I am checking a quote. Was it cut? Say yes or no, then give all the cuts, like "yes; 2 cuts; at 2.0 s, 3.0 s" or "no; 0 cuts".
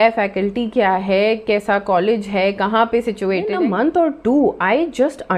yes; 1 cut; at 3.5 s